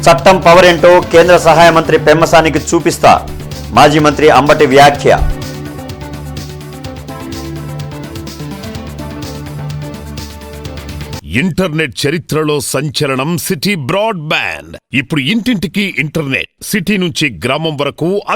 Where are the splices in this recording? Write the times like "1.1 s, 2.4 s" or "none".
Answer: 11.2 s